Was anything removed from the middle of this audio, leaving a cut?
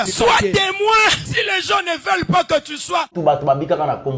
yes; 1 cut; at 3.1 s

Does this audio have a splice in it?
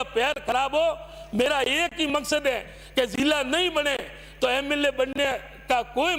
no; 0 cuts

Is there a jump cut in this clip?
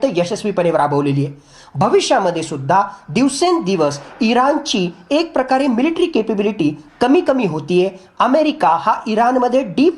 no; 0 cuts

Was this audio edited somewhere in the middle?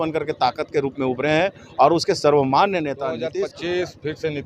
yes; 1 cut; at 3.2 s

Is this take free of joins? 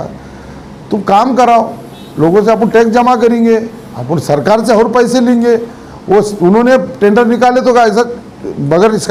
yes; 0 cuts

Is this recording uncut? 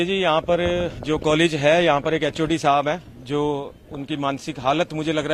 yes; 0 cuts

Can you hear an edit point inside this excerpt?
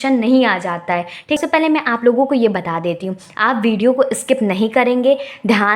yes; 1 cut; at 1.4 s

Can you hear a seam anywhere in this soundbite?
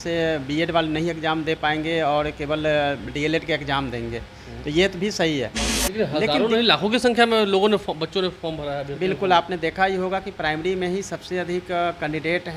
yes; 1 cut; at 5.6 s

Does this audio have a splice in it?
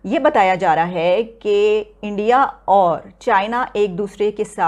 no; 0 cuts

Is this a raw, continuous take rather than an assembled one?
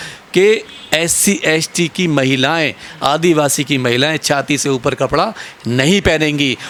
yes; 0 cuts

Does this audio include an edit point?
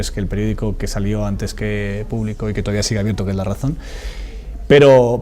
yes; 1 cut; at 1.2 s

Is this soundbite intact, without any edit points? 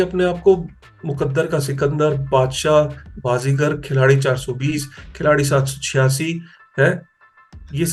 yes; 0 cuts

